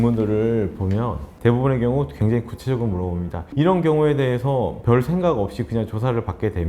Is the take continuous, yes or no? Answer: no